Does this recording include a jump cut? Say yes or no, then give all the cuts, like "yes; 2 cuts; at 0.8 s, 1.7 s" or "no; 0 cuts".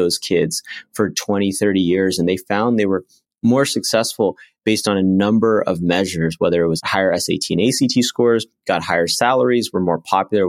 yes; 1 cut; at 6.8 s